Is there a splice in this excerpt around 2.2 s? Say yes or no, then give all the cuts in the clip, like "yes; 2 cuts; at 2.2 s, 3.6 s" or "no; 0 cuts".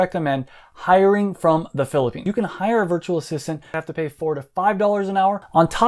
no; 0 cuts